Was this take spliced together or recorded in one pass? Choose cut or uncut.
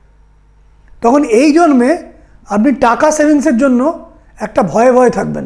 uncut